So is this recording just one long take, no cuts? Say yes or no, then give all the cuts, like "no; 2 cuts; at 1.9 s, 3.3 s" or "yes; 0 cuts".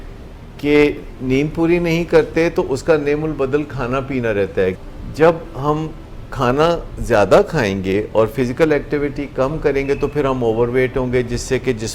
no; 1 cut; at 4.8 s